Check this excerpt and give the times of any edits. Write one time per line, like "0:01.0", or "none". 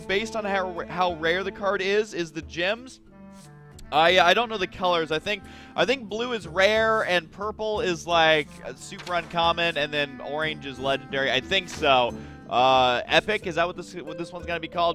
0:12.1